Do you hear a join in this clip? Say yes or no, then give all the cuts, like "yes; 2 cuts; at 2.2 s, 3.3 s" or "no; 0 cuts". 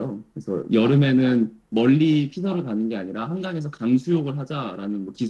no; 0 cuts